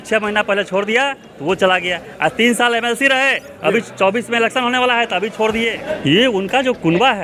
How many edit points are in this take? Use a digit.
1